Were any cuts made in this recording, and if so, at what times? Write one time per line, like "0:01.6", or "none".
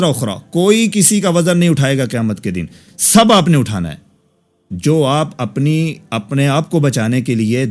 none

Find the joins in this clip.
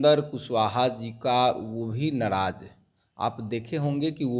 none

